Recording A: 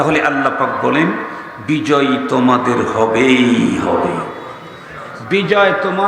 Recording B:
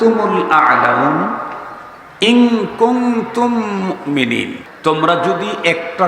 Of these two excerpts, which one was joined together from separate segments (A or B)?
B